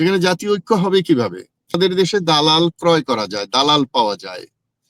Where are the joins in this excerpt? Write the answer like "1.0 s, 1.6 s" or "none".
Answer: 1.8 s